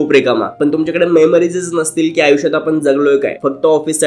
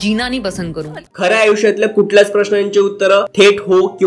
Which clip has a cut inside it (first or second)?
second